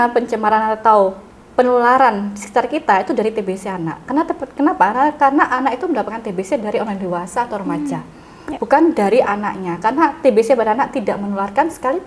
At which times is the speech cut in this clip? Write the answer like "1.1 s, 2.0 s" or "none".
1.3 s